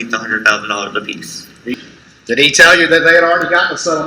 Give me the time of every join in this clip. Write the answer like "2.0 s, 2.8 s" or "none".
1.7 s